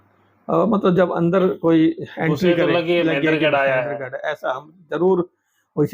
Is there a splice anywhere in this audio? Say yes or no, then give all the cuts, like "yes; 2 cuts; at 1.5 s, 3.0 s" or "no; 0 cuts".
no; 0 cuts